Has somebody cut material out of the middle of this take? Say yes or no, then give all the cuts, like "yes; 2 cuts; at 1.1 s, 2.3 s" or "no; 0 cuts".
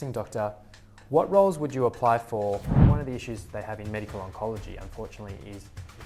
yes; 1 cut; at 2.8 s